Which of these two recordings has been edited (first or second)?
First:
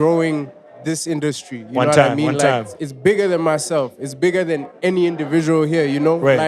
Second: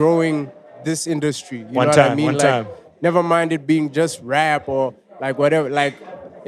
first